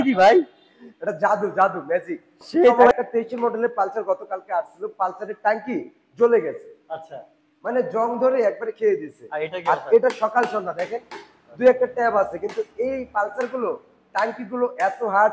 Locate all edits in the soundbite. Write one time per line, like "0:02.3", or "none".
0:02.9